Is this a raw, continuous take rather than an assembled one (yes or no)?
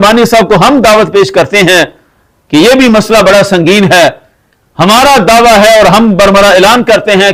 yes